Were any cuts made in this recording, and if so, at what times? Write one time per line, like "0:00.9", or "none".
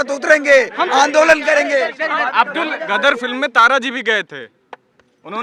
none